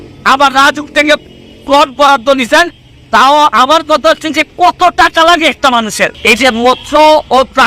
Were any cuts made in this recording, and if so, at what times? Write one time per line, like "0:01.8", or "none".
0:06.1

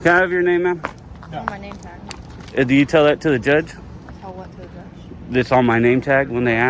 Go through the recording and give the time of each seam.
none

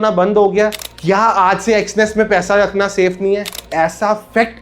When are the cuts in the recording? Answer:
0:00.9
0:03.6

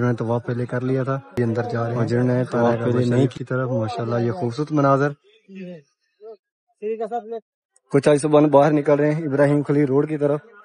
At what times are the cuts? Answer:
0:03.3

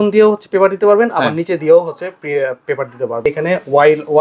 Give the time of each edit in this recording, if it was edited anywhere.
0:03.3

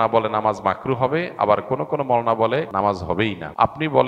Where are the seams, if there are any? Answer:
0:02.9

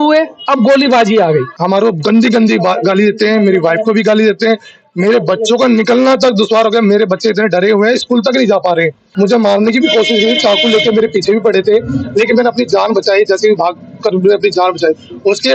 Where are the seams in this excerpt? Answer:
0:01.5
0:09.0

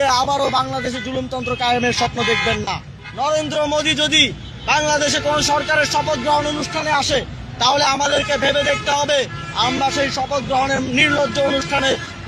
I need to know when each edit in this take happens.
0:02.9

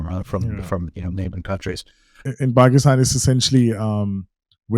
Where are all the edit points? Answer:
0:02.2

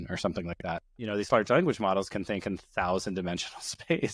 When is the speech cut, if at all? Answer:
0:00.9

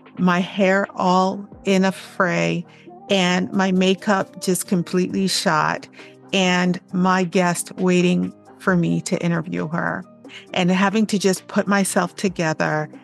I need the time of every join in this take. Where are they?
none

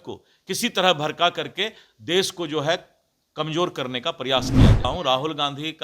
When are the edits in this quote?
0:04.9

